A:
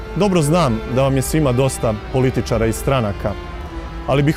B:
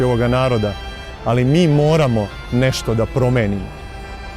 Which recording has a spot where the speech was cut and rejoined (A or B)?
B